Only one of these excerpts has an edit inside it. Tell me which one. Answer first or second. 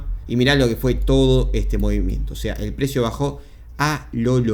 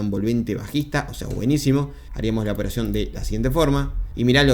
second